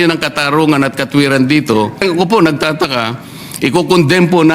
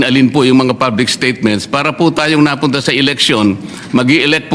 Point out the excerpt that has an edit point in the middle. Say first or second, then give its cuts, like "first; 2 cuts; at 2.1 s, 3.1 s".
first; 1 cut; at 2.0 s